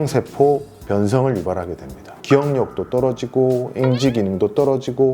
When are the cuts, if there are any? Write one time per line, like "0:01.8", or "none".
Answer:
0:02.0